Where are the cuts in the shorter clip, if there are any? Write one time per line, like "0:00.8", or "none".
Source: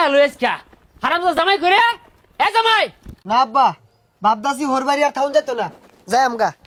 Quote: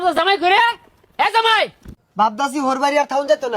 0:01.9